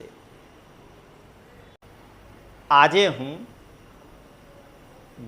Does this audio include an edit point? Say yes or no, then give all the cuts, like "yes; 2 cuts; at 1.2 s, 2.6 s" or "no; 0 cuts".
yes; 1 cut; at 1.8 s